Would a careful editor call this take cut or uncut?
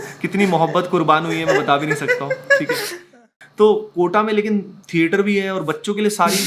cut